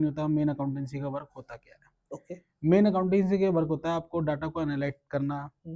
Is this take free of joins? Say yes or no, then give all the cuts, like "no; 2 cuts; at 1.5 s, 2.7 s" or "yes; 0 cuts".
yes; 0 cuts